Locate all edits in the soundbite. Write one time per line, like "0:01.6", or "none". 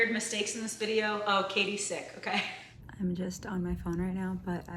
0:02.6